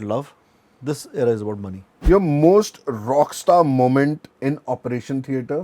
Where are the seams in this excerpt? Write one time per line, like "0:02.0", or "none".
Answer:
0:02.0
0:04.3

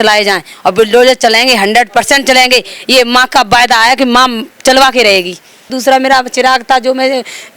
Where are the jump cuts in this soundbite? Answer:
0:05.8

